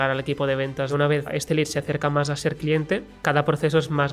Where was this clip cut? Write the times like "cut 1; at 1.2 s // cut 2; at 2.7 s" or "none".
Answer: cut 1; at 1.3 s // cut 2; at 3.1 s

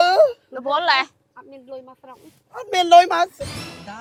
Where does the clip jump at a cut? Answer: none

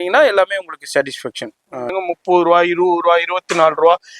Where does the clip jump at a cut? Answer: cut 1; at 1.9 s

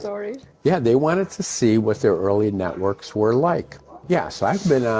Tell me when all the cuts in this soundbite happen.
cut 1; at 4.0 s

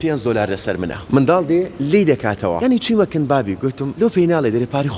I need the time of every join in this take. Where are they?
cut 1; at 1.0 s // cut 2; at 2.6 s // cut 3; at 3.9 s

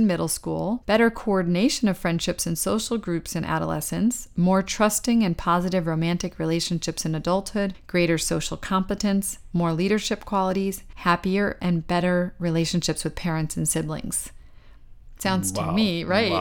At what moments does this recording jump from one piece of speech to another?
cut 1; at 0.8 s // cut 2; at 7.8 s // cut 3; at 10.9 s

